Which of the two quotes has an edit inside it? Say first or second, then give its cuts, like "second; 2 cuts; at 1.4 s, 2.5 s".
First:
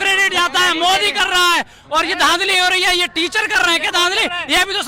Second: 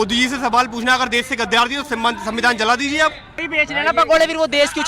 second; 1 cut; at 3.5 s